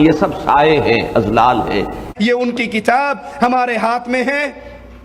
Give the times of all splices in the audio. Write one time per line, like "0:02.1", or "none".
0:02.0